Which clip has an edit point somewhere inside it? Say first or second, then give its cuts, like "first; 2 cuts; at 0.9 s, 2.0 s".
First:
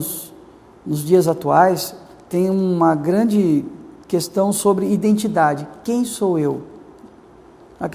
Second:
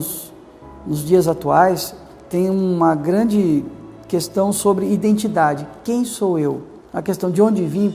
second; 1 cut; at 6.8 s